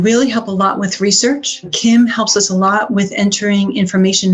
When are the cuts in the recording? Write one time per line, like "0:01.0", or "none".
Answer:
0:01.7